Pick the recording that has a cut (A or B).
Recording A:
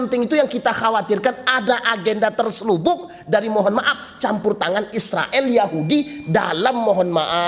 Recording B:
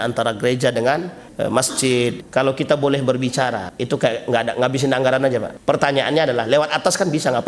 B